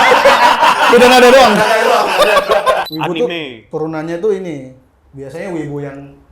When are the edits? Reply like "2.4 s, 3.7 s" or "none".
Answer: 2.9 s